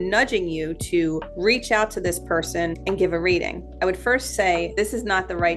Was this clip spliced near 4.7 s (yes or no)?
yes